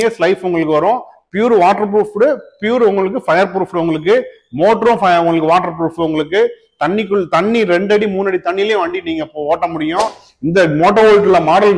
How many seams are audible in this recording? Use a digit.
1